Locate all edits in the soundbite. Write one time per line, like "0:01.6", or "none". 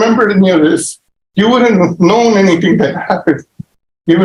none